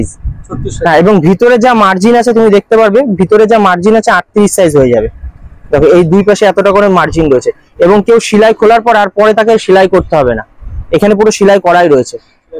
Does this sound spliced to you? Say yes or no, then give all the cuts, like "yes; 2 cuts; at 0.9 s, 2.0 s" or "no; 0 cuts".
no; 0 cuts